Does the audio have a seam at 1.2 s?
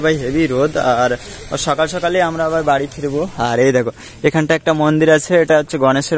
no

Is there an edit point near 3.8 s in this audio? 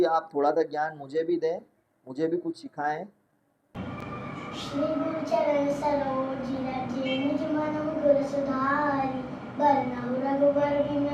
yes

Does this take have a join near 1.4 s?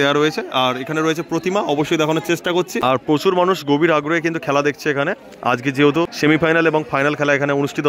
no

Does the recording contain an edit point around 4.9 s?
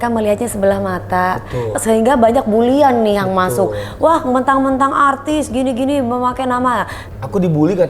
no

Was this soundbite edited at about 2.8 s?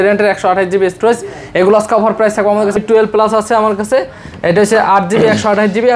yes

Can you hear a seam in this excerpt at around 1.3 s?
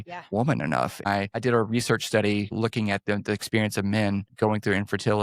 yes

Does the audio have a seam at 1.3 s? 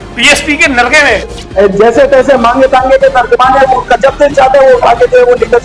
yes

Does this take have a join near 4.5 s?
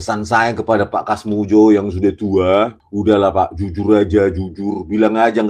no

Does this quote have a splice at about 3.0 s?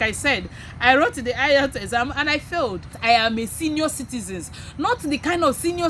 yes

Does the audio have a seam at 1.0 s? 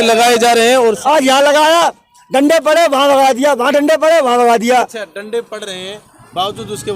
yes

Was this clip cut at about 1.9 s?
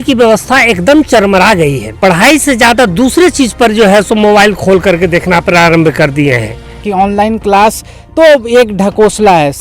yes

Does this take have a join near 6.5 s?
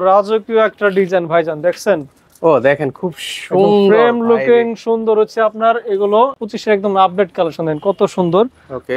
yes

